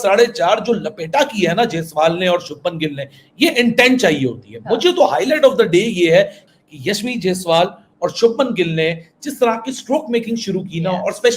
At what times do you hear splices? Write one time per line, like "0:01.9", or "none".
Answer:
0:06.4